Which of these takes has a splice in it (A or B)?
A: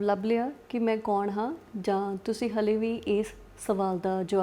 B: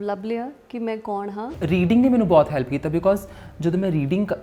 B